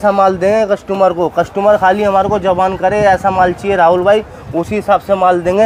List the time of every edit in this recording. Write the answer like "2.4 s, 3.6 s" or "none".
none